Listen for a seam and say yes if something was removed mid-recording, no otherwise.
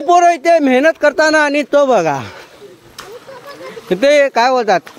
no